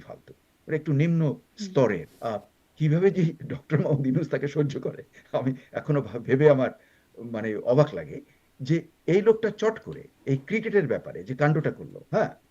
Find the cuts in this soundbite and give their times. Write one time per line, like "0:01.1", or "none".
0:02.1